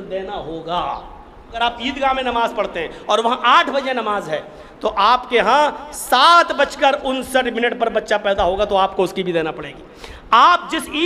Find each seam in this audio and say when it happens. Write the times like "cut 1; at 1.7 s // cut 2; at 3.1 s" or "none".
cut 1; at 1.6 s